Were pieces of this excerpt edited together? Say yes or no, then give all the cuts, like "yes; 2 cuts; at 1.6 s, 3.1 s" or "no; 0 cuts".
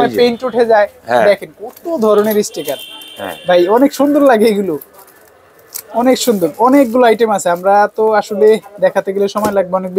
no; 0 cuts